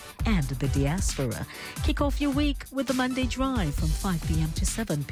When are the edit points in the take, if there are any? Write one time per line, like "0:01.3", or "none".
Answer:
none